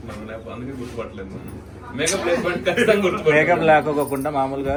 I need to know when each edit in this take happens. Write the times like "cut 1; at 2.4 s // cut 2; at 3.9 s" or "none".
none